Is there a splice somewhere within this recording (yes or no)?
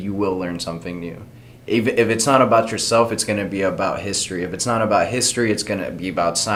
no